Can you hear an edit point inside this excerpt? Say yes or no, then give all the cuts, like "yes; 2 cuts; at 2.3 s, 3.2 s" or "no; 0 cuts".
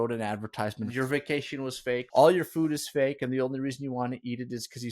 yes; 2 cuts; at 0.9 s, 2.1 s